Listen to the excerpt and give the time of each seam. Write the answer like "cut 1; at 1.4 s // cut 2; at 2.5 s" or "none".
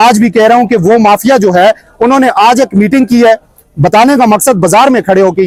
none